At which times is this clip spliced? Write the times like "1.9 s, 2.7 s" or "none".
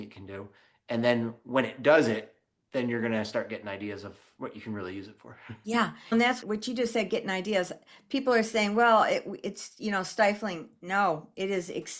6.1 s